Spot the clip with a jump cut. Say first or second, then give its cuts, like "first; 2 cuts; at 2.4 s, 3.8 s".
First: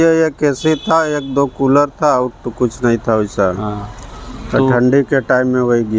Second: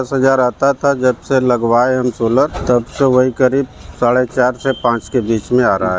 second; 1 cut; at 2.5 s